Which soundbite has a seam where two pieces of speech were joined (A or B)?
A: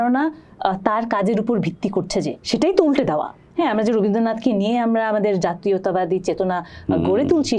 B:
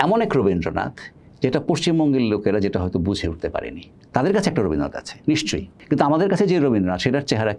B